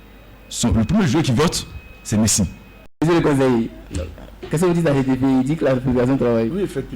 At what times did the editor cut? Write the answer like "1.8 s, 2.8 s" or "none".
3.0 s